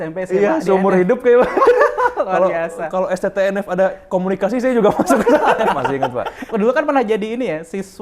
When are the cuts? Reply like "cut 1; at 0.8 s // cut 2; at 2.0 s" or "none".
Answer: cut 1; at 5.9 s